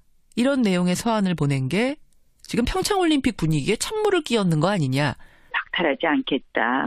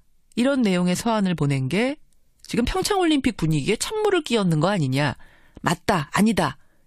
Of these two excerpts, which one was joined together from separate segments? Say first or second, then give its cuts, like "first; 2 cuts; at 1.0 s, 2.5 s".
second; 1 cut; at 5.6 s